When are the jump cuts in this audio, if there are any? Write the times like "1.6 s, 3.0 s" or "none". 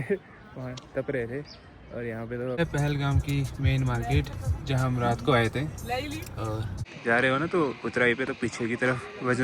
2.6 s, 6.8 s